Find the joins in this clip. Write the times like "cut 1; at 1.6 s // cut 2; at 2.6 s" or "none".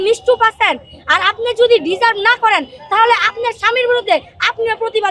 none